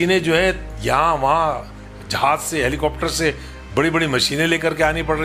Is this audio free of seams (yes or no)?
yes